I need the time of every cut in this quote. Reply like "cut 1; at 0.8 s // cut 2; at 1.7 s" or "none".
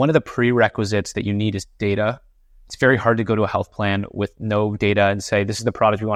none

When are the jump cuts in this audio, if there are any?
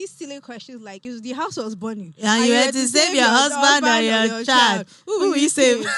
cut 1; at 1.0 s

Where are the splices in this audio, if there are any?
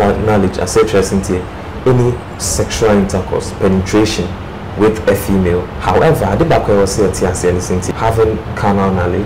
cut 1; at 5.7 s

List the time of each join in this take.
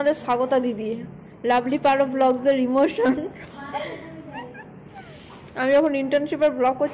none

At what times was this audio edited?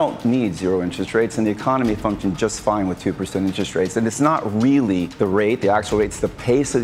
cut 1; at 5.1 s

